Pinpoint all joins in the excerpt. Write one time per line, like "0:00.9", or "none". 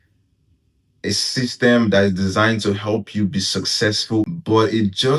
0:04.3